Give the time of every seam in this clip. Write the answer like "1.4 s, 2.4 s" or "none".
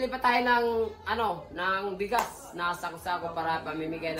none